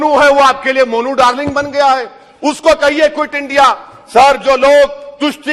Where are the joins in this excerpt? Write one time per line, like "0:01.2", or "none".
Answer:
none